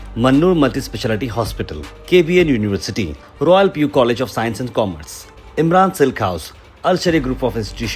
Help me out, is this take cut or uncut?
uncut